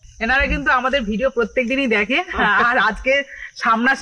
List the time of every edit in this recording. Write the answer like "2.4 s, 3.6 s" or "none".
none